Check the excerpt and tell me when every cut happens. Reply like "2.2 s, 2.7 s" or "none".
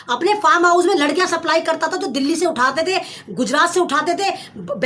none